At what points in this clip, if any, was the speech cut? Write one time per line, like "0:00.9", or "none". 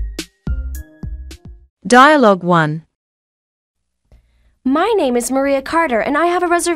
0:01.4